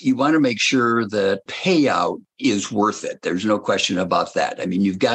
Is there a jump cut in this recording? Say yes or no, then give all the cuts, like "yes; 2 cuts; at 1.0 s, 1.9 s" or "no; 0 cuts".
yes; 2 cuts; at 1.5 s, 2.3 s